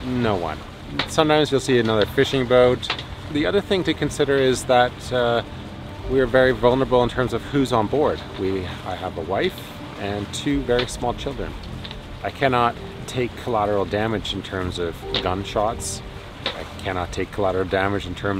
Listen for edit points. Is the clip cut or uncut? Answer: cut